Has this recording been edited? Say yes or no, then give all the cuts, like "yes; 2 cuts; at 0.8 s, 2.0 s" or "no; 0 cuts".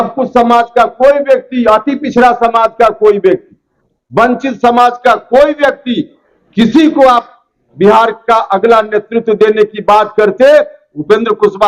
no; 0 cuts